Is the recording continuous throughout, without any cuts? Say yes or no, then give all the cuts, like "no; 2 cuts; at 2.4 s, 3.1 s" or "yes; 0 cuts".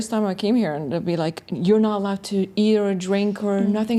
yes; 0 cuts